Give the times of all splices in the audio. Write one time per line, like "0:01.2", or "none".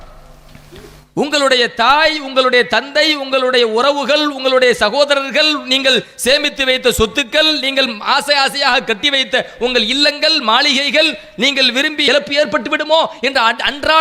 0:12.0